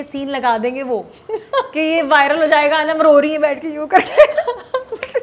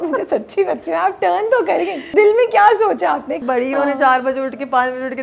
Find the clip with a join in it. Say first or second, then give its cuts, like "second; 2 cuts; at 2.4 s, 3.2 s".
second; 2 cuts; at 2.0 s, 3.4 s